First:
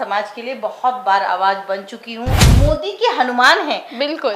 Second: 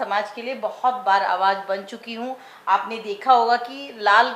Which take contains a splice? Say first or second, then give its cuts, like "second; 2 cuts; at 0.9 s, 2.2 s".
first; 1 cut; at 2.5 s